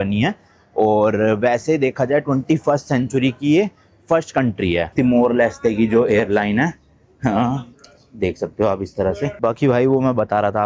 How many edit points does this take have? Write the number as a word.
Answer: two